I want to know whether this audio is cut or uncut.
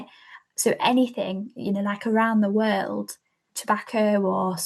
cut